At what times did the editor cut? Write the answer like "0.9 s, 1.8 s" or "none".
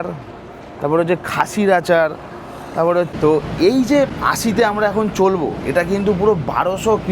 3.1 s, 4.2 s

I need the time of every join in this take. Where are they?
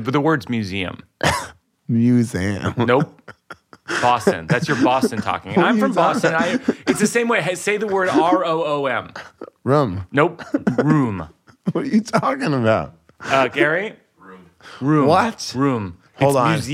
1.7 s

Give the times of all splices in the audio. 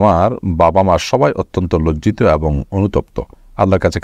none

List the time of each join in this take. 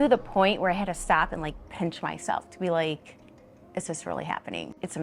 none

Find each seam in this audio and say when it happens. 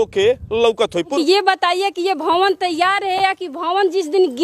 1.1 s

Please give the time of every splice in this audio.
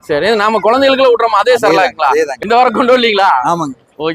2.3 s

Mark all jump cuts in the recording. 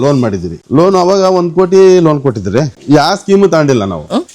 2.8 s

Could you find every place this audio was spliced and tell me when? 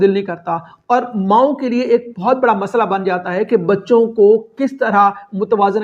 none

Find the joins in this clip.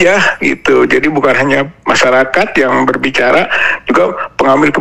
none

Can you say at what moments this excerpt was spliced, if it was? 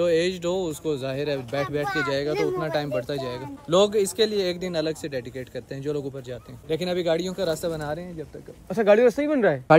none

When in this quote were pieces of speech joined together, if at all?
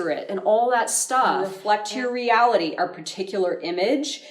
1.5 s

